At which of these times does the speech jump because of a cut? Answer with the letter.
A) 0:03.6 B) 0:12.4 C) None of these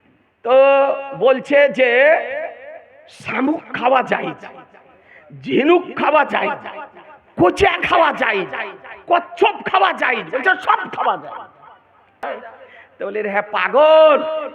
B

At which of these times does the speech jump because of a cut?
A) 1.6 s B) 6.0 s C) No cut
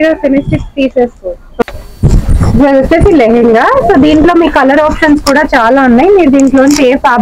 A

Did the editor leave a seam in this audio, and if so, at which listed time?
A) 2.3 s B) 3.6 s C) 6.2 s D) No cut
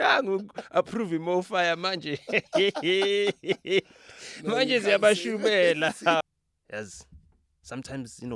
C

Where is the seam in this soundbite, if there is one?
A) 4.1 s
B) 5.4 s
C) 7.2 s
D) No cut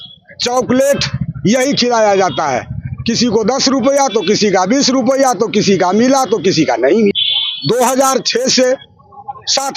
C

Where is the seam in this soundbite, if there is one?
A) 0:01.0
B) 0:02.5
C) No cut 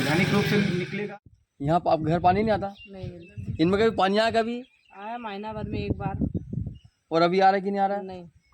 A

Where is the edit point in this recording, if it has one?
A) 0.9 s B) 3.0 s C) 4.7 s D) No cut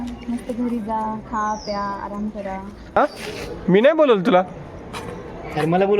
B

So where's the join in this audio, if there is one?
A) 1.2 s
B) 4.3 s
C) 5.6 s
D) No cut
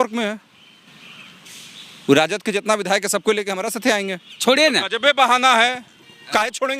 B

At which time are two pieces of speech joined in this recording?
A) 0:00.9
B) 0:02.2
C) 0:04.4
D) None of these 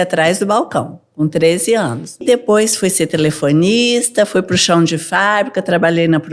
B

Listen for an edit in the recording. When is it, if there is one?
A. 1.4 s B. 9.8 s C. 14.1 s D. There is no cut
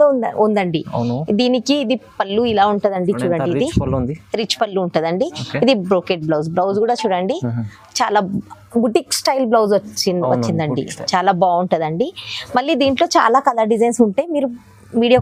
D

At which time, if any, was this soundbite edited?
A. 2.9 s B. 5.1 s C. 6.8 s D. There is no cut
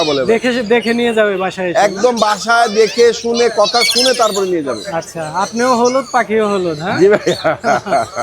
D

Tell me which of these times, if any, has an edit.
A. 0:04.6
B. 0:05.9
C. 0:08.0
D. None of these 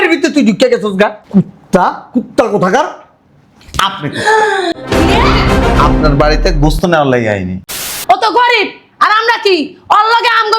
C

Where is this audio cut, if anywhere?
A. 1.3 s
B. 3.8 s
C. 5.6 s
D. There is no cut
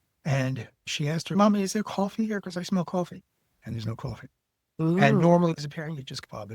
A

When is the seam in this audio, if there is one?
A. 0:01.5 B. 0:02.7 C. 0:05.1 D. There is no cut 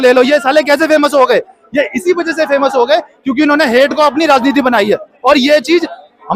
D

